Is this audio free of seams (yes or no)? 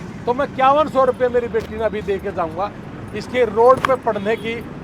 yes